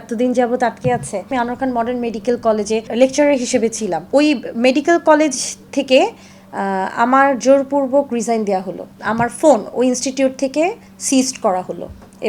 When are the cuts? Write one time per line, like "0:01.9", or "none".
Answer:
none